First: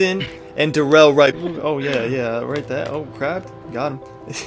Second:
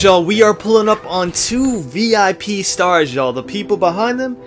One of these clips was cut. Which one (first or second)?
first